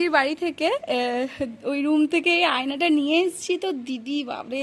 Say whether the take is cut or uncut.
uncut